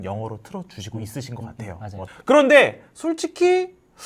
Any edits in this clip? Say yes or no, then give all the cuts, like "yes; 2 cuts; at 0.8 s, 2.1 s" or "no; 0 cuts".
yes; 1 cut; at 2.1 s